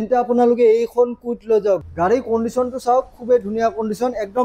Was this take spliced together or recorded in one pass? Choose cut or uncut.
cut